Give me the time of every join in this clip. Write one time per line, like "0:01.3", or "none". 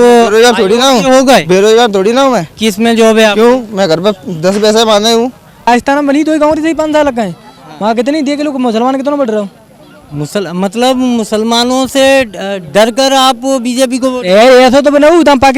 0:05.7